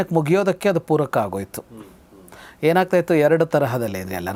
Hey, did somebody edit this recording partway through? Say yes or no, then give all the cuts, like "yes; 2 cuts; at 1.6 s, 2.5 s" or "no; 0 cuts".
no; 0 cuts